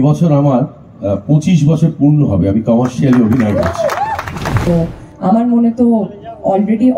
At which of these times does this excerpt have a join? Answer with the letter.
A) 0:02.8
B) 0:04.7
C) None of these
B